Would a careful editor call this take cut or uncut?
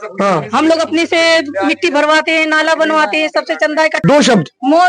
cut